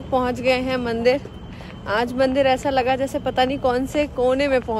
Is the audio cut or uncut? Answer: uncut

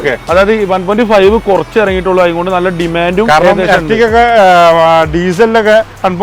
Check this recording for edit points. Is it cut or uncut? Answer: uncut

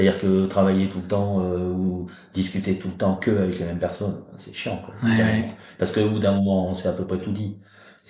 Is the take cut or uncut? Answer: uncut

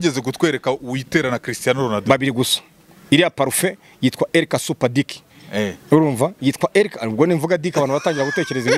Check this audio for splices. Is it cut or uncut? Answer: uncut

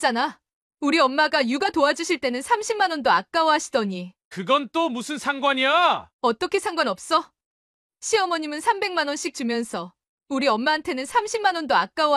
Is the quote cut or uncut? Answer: uncut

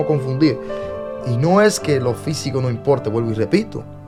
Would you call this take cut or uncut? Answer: uncut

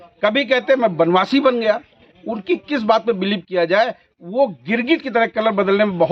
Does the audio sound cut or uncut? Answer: uncut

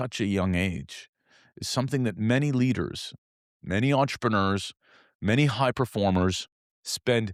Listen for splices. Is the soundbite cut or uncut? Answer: uncut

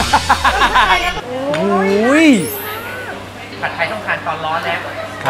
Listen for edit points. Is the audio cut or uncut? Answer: cut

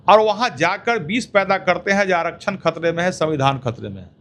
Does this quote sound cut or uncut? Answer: uncut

